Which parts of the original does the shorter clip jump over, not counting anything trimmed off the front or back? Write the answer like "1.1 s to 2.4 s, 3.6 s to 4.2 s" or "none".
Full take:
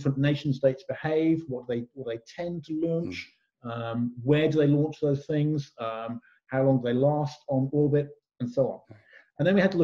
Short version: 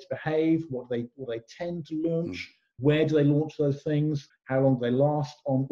3.5 s to 4.2 s, 5.7 s to 6.3 s

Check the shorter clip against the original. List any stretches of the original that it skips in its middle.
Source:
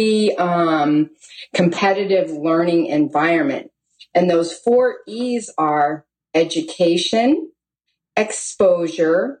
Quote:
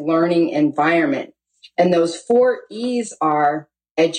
none

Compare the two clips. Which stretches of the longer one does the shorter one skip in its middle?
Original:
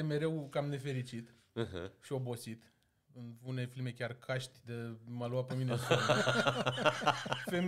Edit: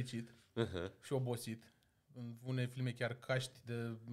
none

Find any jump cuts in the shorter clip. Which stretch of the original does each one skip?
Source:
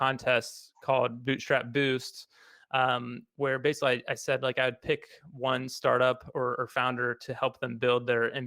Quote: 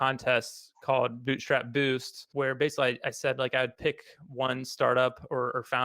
2.2 s to 3.2 s

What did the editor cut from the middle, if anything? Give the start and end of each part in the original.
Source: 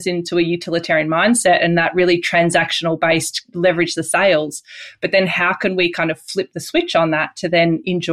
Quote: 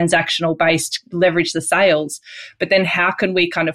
none

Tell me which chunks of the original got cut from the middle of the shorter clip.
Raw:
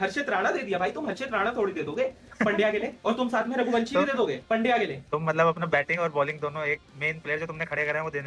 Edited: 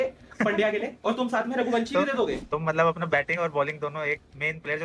4.4 s to 5.0 s

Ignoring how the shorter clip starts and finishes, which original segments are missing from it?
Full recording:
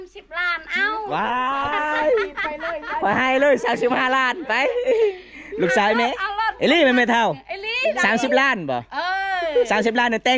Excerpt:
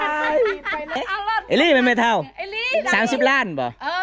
2.7 s to 6.1 s

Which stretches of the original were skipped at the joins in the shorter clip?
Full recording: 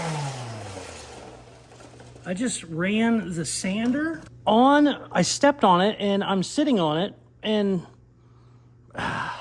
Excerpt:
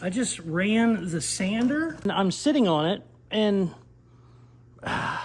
4.3 s to 6.2 s

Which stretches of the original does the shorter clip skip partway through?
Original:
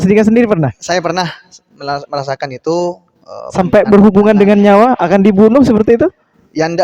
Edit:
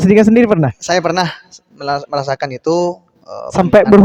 none

